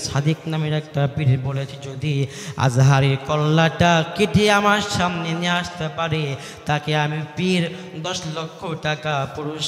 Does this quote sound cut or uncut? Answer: uncut